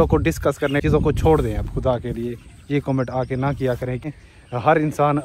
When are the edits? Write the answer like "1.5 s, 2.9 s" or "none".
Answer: 0.8 s, 4.2 s

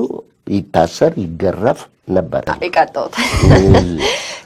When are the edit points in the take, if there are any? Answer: 2.5 s

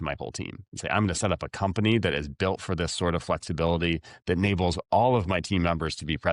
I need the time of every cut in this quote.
none

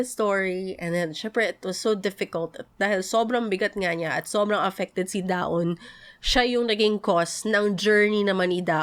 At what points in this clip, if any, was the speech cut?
none

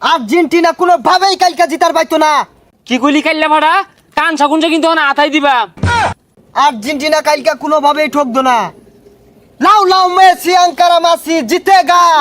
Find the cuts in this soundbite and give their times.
2.6 s, 6.1 s

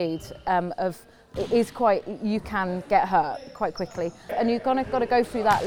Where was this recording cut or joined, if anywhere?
4.3 s

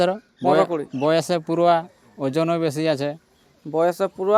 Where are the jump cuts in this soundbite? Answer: none

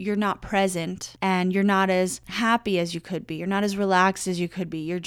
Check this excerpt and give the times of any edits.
1.0 s, 2.2 s

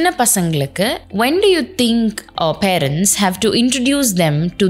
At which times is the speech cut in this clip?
1.0 s, 2.2 s

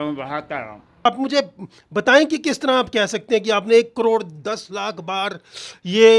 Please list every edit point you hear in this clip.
1.1 s

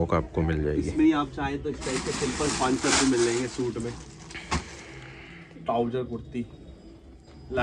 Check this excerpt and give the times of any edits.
none

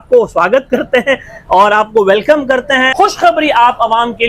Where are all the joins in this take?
2.9 s

